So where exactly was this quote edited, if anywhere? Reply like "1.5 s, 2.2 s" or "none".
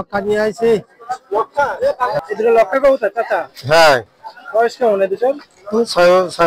none

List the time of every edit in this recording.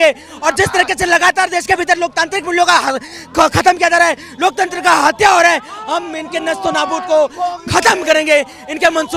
none

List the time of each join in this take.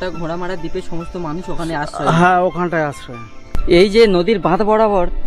3.5 s

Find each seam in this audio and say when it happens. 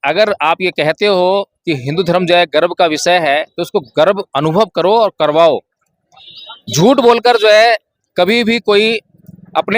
none

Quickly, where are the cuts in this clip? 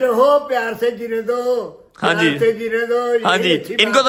none

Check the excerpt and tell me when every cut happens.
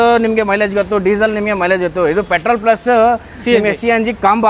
none

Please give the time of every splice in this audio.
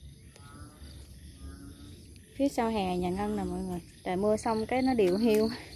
1.0 s, 3.9 s

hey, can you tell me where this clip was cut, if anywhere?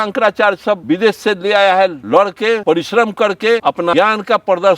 0.8 s, 2.0 s, 3.8 s

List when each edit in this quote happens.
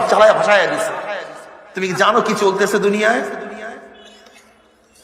none

